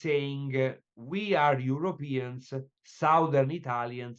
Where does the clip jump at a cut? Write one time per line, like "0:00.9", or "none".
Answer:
0:00.9